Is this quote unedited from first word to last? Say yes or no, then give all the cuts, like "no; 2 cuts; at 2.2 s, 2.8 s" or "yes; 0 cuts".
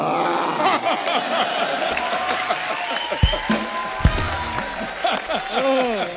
yes; 0 cuts